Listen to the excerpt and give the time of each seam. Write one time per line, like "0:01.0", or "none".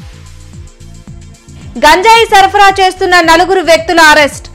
0:01.0